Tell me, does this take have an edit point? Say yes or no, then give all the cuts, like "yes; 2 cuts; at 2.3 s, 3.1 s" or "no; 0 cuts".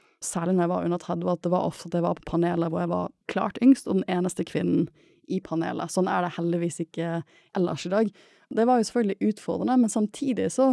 yes; 3 cuts; at 3.2 s, 7.4 s, 8.5 s